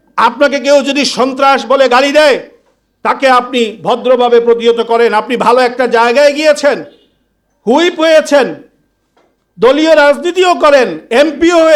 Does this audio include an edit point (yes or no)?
no